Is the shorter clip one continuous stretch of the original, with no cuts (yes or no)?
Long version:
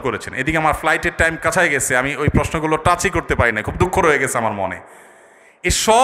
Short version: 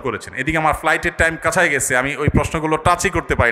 yes